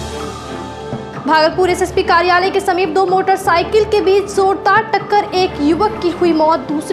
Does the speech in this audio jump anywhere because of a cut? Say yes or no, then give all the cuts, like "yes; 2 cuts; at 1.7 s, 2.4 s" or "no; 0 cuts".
yes; 1 cut; at 1.1 s